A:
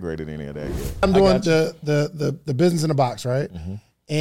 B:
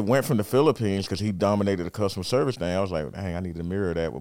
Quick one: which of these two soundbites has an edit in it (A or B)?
A